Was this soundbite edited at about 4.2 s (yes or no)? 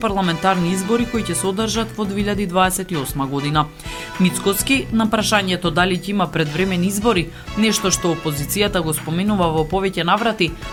no